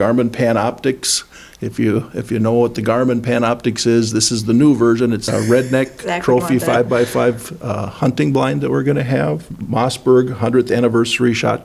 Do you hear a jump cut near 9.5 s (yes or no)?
yes